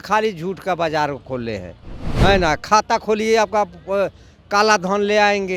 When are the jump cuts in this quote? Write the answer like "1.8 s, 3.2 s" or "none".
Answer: none